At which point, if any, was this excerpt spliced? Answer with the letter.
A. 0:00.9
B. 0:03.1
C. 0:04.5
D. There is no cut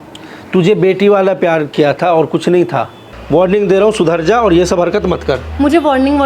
B